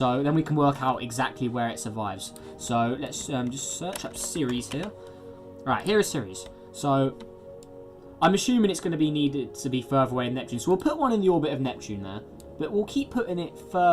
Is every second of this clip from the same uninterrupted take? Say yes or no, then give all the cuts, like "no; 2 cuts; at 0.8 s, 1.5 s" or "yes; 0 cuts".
yes; 0 cuts